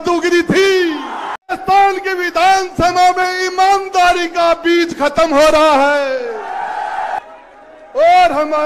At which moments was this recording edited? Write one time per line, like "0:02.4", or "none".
0:01.5
0:07.2